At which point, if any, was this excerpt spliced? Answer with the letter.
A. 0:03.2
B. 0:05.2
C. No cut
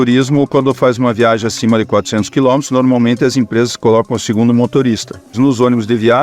C